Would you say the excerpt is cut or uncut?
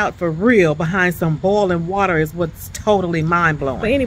uncut